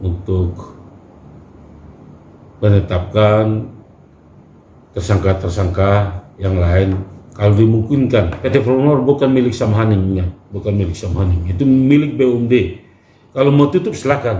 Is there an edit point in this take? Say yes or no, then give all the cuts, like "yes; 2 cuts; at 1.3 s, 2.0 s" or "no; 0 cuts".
yes; 1 cut; at 8.4 s